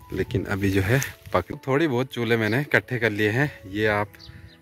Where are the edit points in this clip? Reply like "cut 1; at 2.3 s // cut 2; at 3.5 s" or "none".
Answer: cut 1; at 1.2 s